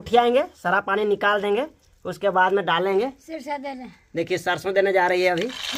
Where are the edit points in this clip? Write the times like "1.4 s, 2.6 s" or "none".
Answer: none